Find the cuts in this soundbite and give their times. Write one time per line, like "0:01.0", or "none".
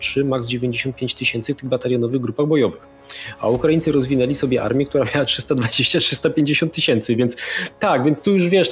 none